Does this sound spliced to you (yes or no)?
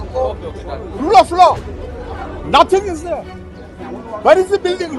no